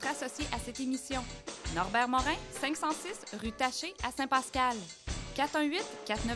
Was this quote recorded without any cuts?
yes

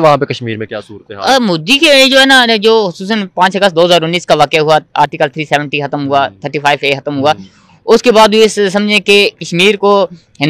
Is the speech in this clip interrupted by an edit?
no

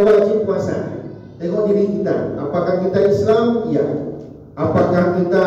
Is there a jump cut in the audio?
no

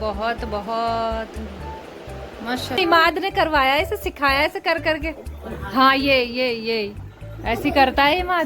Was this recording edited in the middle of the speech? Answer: yes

